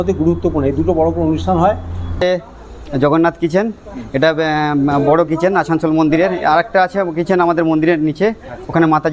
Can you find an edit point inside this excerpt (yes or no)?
yes